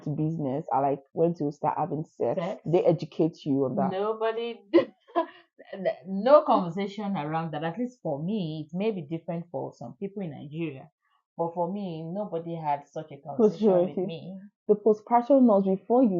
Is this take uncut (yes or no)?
yes